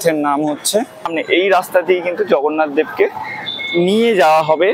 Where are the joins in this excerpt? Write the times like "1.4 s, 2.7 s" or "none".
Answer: 1.1 s